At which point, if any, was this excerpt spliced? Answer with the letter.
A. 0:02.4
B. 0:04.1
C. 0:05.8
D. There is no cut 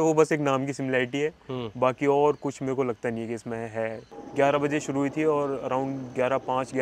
B